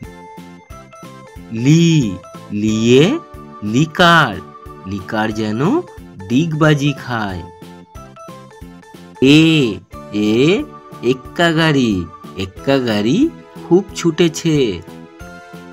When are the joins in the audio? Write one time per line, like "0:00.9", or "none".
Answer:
0:14.8